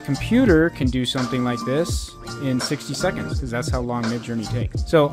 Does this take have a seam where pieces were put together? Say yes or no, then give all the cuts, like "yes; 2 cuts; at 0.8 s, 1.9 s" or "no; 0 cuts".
no; 0 cuts